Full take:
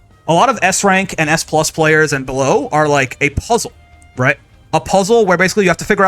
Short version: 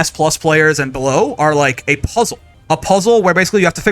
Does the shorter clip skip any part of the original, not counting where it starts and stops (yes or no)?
yes